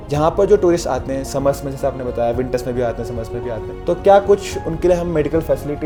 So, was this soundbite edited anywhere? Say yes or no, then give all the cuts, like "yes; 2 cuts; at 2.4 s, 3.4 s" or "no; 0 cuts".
no; 0 cuts